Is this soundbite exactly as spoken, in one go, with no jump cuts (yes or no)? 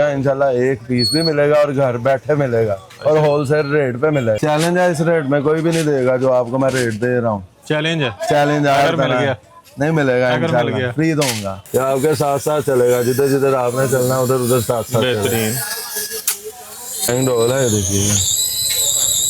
no